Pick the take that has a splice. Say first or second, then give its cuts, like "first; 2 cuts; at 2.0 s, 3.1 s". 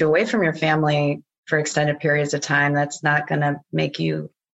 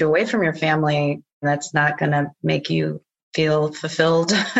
second; 1 cut; at 1.4 s